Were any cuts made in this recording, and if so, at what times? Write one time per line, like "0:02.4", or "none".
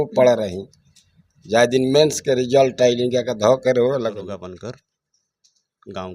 0:04.3